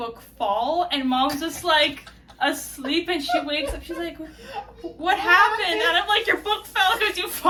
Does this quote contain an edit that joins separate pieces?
no; 0 cuts

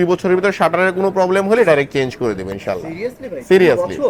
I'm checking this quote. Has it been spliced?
no; 0 cuts

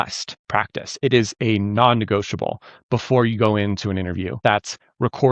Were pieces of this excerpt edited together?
yes; 1 cut; at 4.4 s

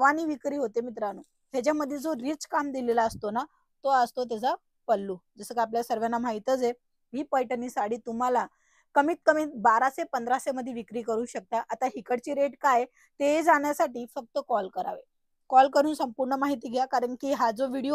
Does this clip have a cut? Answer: no; 0 cuts

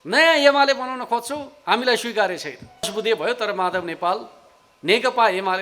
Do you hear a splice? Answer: yes; 1 cut; at 2.9 s

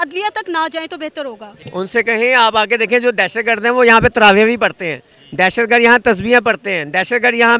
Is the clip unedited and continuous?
no; 1 cut; at 1.5 s

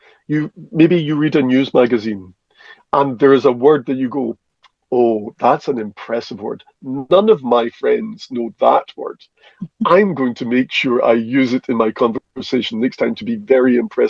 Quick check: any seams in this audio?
no; 0 cuts

